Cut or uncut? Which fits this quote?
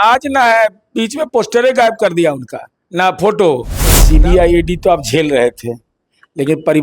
cut